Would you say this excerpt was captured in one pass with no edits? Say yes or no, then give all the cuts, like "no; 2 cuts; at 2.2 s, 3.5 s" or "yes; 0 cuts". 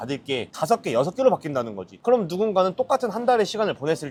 yes; 0 cuts